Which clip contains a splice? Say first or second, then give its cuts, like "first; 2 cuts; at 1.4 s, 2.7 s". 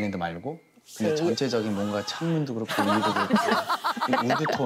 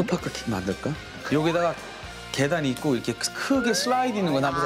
second; 1 cut; at 1.1 s